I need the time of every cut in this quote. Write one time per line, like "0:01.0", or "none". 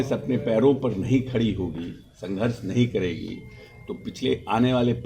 none